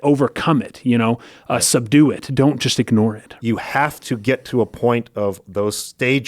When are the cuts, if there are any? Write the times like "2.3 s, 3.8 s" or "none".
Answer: 3.3 s